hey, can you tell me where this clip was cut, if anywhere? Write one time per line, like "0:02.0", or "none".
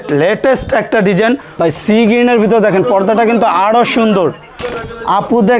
0:01.5
0:04.6